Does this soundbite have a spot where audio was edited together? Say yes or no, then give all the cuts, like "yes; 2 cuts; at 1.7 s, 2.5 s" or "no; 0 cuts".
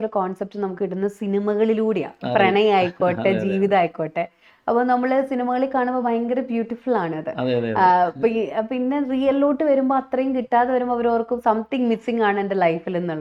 no; 0 cuts